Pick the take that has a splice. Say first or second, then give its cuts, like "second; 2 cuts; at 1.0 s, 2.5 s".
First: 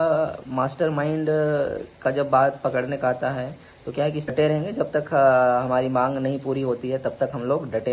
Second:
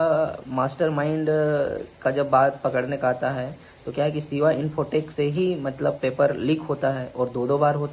first; 1 cut; at 4.3 s